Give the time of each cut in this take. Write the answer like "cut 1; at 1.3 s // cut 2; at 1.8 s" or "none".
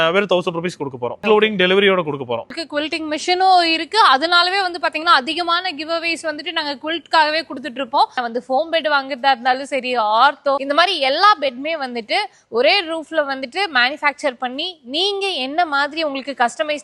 cut 1; at 1.1 s // cut 2; at 2.6 s // cut 3; at 8.1 s // cut 4; at 10.6 s